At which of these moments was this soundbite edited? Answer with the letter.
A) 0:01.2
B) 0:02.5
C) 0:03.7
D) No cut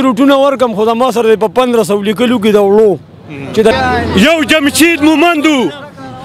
C